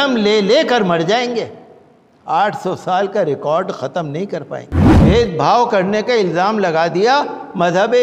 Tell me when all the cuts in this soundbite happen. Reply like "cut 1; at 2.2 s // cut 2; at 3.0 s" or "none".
cut 1; at 4.8 s